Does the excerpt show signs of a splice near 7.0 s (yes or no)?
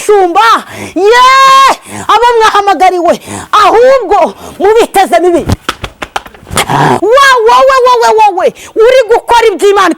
yes